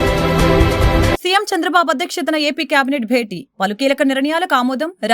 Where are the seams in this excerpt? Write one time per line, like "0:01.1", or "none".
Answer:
0:01.1